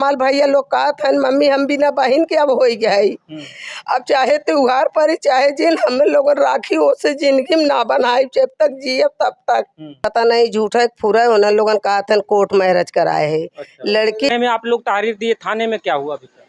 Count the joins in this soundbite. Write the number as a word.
two